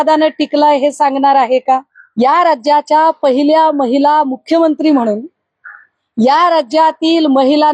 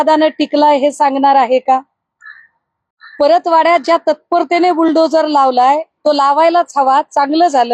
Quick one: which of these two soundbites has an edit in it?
first; 1 cut; at 2.0 s

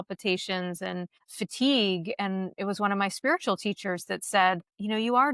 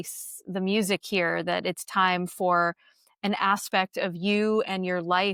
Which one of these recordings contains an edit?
first; 1 cut; at 1.2 s

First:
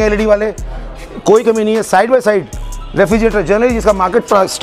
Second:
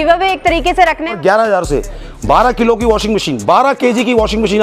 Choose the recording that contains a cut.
second; 1 cut; at 1.1 s

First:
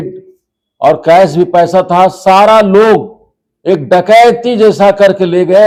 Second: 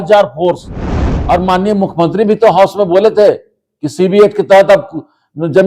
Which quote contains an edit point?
second; 1 cut; at 1.1 s

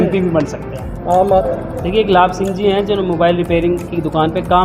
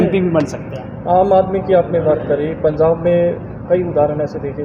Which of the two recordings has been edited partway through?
first; 1 cut; at 1.5 s

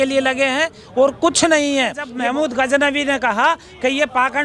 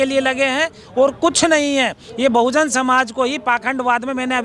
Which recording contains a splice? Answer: first; 1 cut; at 2.1 s

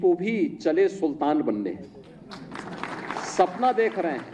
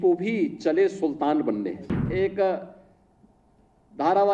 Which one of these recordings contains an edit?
second; 1 cut; at 2.1 s

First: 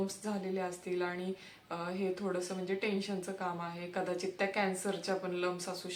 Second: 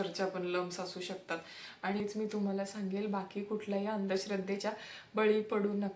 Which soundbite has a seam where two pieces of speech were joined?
second; 1 cut; at 2.0 s

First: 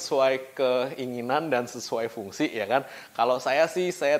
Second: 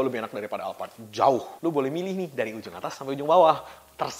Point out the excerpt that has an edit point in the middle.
second; 1 cut; at 1.5 s

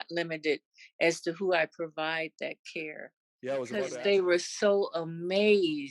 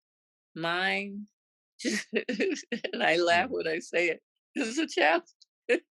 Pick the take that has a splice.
first; 1 cut; at 3.9 s

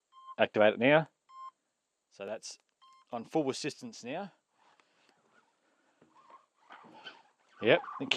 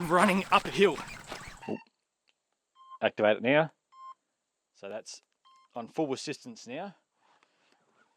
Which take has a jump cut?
second; 1 cut; at 1.5 s

